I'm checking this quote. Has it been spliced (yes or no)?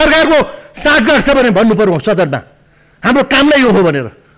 no